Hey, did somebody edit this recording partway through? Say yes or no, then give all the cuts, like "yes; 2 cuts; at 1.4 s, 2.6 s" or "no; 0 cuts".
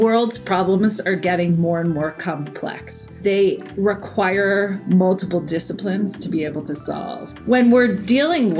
yes; 1 cut; at 7.3 s